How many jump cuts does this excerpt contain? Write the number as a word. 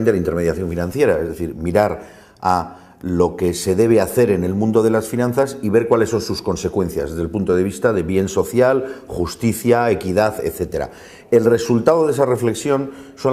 one